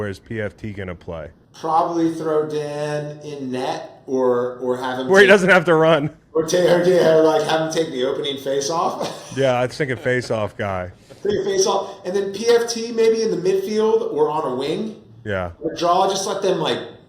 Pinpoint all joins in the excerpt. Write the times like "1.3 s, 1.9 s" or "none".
1.4 s